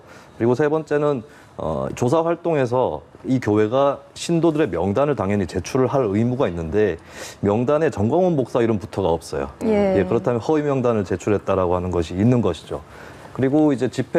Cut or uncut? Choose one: uncut